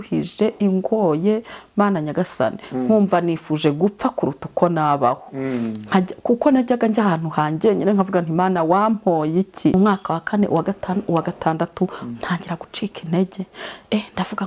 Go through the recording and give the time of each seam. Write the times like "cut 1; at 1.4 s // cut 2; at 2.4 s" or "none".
cut 1; at 9.7 s

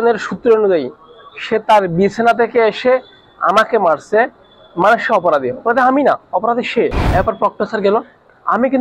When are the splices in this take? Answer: cut 1; at 7.0 s

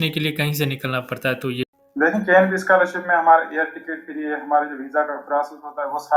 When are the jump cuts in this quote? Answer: cut 1; at 1.7 s

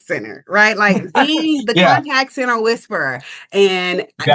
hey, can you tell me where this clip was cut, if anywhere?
none

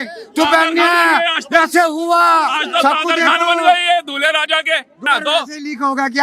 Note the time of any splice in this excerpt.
cut 1; at 5.1 s

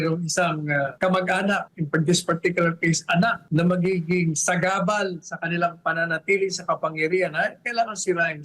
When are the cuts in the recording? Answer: cut 1; at 0.9 s // cut 2; at 1.7 s // cut 3; at 3.4 s

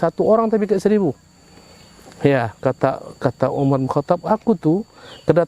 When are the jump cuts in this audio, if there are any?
none

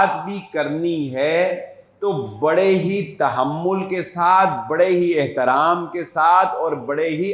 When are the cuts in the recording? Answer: none

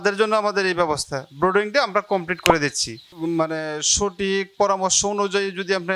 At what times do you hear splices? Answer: cut 1; at 3.0 s

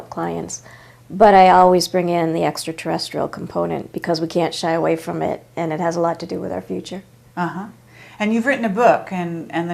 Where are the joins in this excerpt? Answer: cut 1; at 4.0 s

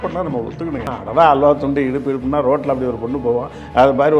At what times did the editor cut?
cut 1; at 0.9 s

